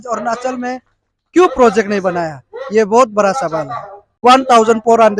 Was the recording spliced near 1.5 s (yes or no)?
no